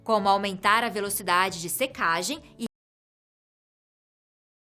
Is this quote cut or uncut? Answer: uncut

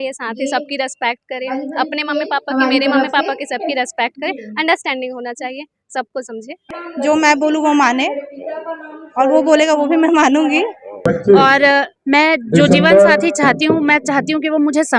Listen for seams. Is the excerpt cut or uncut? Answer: cut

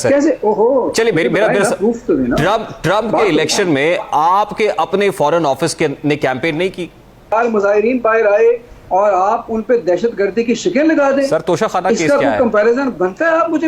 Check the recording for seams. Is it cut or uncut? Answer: cut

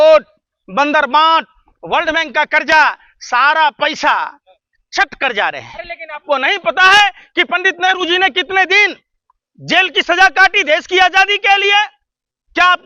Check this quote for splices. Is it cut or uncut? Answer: cut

